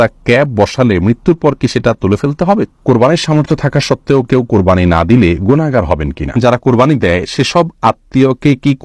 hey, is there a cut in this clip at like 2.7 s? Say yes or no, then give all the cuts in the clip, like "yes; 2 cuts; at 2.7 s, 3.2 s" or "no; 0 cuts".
yes; 2 cuts; at 2.7 s, 6.3 s